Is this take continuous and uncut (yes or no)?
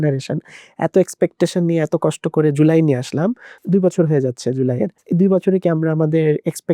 no